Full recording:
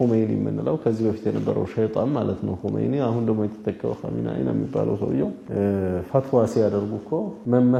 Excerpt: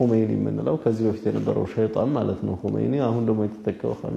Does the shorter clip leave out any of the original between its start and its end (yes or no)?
no